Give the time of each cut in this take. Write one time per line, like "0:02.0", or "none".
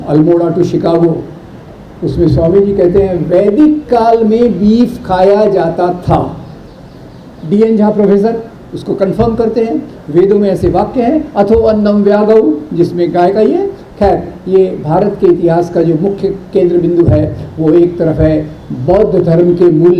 none